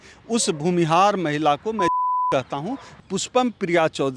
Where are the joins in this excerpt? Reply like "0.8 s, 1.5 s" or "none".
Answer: 2.9 s